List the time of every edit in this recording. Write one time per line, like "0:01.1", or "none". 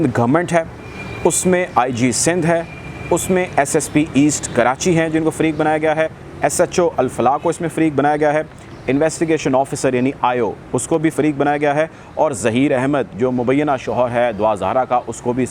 none